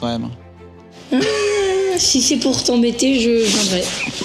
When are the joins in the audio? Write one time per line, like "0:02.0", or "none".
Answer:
none